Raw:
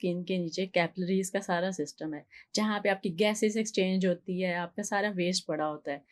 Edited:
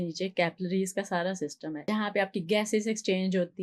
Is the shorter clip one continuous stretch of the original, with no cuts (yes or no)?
no